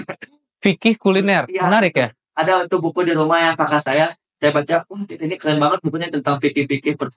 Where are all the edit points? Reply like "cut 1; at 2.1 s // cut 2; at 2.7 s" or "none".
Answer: none